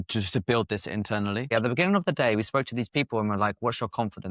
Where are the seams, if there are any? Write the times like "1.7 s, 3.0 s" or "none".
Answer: 1.5 s